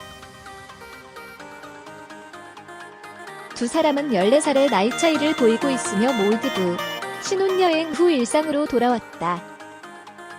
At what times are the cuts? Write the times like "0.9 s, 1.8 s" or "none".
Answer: 3.6 s, 9.4 s